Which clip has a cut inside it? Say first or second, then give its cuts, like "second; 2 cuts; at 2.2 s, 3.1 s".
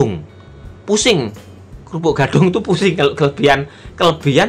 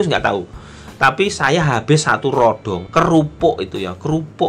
second; 1 cut; at 2.8 s